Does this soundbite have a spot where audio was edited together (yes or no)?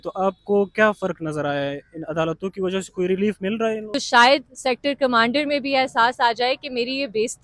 yes